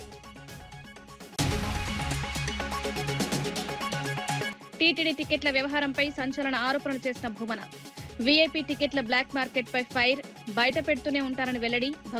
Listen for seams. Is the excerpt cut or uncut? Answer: cut